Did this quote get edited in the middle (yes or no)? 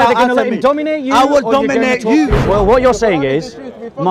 yes